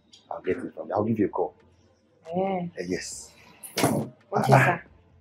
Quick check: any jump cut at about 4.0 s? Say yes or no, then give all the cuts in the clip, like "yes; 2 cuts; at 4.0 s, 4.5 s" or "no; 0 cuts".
no; 0 cuts